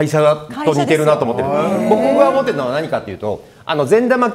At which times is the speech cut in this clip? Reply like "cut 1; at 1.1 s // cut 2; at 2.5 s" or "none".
none